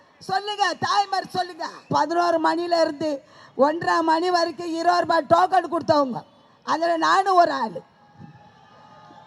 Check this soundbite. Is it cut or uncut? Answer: cut